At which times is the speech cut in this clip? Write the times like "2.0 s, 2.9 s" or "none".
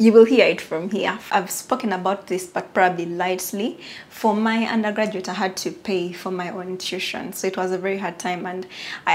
1.2 s